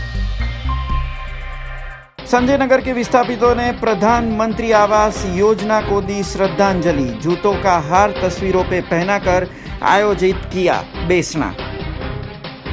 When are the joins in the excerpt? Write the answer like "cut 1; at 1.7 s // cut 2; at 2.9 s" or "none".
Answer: cut 1; at 1.7 s